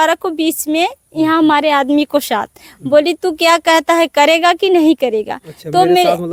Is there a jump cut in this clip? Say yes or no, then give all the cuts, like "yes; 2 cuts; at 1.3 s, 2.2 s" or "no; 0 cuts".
no; 0 cuts